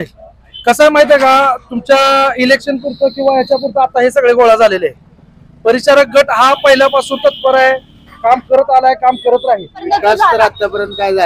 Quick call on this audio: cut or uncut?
cut